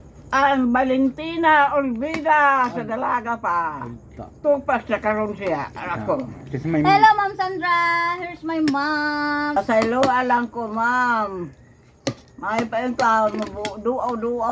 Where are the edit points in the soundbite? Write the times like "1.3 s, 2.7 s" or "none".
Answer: 9.5 s